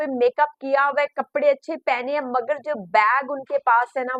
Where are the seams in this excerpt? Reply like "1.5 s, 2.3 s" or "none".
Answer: none